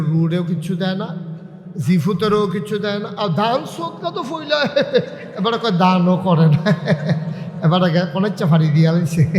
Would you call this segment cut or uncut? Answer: uncut